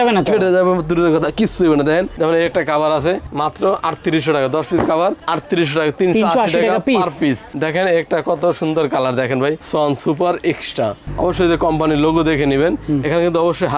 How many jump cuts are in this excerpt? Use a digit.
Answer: 2